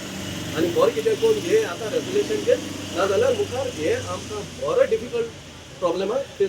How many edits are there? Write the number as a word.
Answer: zero